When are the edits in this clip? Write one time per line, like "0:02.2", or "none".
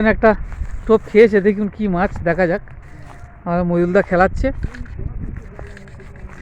none